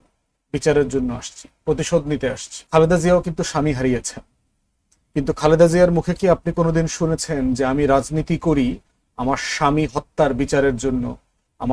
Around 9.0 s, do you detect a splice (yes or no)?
no